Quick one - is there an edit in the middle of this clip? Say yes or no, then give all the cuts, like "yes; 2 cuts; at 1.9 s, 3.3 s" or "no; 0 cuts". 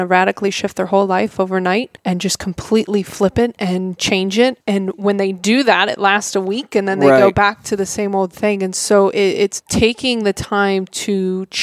yes; 3 cuts; at 1.9 s, 4.6 s, 9.6 s